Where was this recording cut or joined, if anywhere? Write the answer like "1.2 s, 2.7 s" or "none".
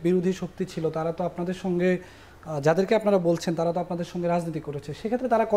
none